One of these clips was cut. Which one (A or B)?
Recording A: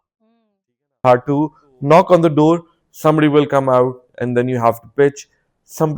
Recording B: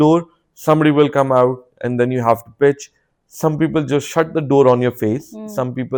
A